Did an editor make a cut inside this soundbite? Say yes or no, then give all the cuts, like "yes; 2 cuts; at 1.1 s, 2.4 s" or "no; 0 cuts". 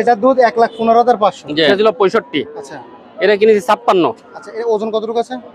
yes; 1 cut; at 1.7 s